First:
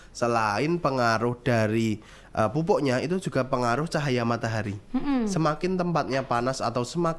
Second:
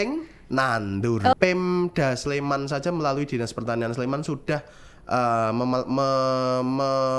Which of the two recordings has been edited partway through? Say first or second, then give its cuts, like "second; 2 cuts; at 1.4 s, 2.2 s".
second; 1 cut; at 1.3 s